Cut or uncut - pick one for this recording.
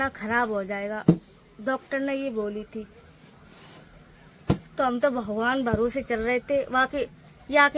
uncut